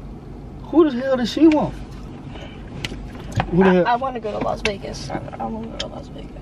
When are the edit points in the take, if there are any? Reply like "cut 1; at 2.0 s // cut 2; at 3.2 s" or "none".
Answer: cut 1; at 2.1 s

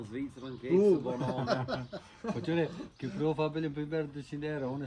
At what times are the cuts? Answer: none

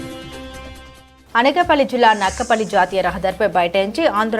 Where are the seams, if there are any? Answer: cut 1; at 1.1 s

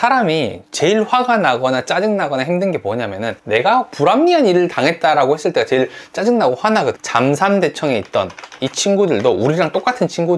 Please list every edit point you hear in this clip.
cut 1; at 3.4 s // cut 2; at 7.0 s

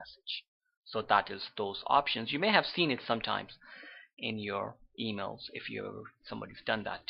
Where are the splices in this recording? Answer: cut 1; at 5.5 s

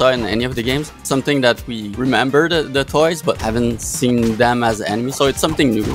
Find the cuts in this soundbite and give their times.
cut 1; at 1.0 s // cut 2; at 1.8 s // cut 3; at 3.4 s

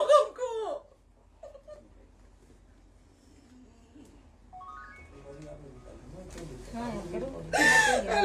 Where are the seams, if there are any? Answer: none

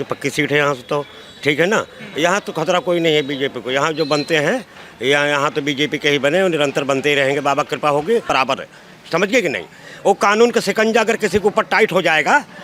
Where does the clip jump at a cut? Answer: cut 1; at 8.3 s

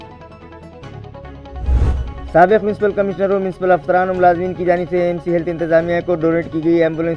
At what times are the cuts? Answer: cut 1; at 1.9 s

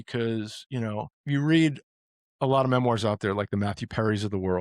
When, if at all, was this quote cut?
cut 1; at 1.2 s

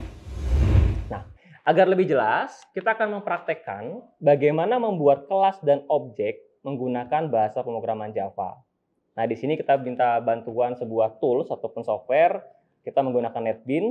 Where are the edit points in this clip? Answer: cut 1; at 1.0 s

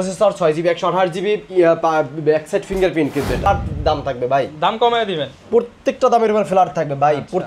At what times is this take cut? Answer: cut 1; at 3.5 s

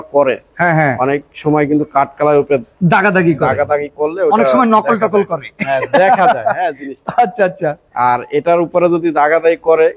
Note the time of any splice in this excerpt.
none

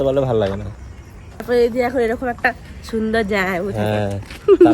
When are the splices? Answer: cut 1; at 1.4 s

